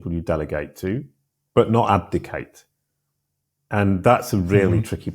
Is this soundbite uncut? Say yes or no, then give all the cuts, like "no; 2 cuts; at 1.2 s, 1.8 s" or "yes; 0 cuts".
yes; 0 cuts